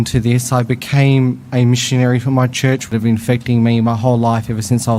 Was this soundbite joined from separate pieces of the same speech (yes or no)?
yes